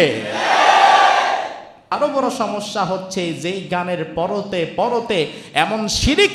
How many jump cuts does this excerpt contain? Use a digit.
1